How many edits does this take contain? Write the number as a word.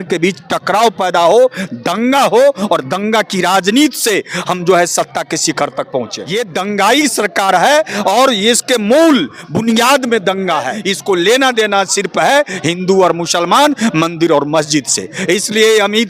two